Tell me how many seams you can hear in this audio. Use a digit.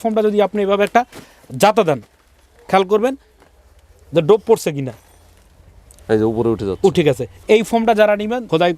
1